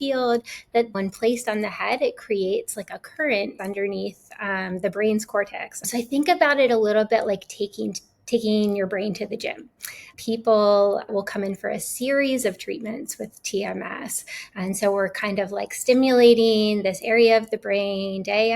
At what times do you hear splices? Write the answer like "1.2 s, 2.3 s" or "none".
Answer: 0.9 s, 3.5 s, 5.9 s, 10.1 s, 11.1 s